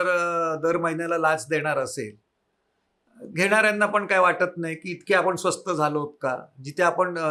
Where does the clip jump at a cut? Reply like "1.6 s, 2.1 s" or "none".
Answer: none